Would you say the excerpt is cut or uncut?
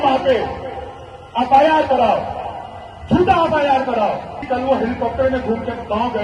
cut